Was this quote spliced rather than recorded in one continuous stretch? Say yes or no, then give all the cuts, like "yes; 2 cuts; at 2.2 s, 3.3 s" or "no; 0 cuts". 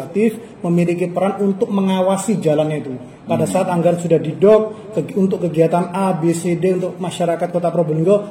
no; 0 cuts